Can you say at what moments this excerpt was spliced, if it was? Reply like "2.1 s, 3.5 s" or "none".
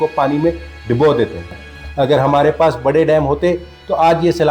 1.5 s

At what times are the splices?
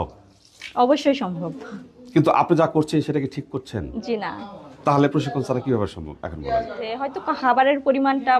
7.1 s

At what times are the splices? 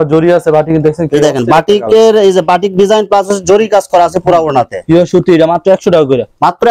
none

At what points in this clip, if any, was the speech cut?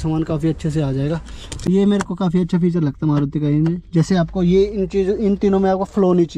1.6 s

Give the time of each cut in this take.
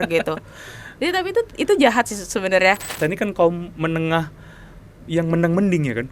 2.9 s

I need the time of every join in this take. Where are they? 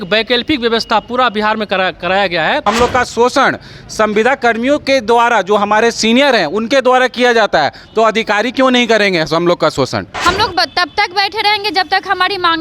2.6 s, 10.1 s

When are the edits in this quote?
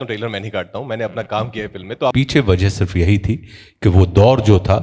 2.1 s

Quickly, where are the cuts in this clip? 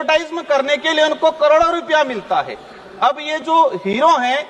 none

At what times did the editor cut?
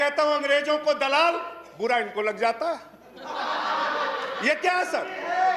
none

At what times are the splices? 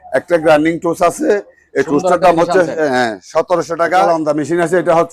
4.1 s

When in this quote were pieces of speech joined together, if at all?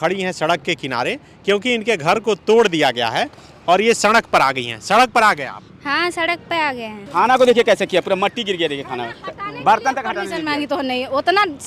7.0 s

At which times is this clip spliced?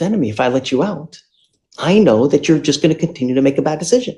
none

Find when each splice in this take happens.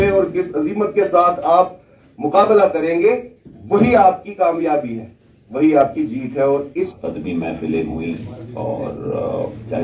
6.9 s

